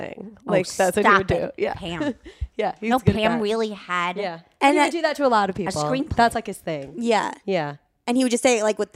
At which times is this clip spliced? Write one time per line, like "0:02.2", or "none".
none